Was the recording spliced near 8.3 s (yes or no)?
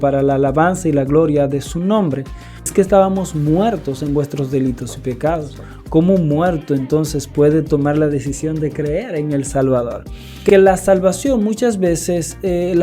no